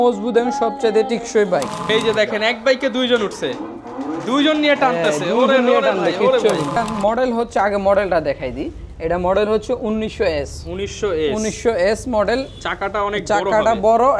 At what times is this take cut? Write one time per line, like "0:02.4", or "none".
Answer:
0:01.8
0:06.8